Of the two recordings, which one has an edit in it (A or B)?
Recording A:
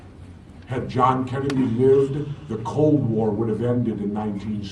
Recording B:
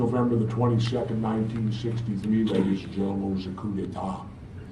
A